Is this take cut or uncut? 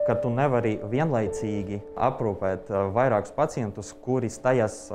cut